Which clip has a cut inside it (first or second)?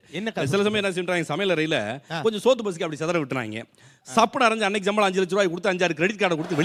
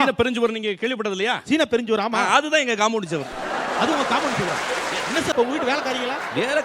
second